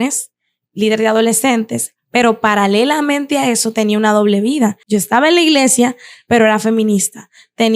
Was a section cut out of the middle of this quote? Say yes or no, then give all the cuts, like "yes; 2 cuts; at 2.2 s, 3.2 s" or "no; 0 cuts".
yes; 1 cut; at 4.8 s